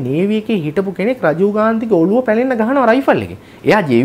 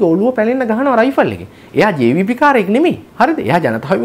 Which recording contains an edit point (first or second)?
second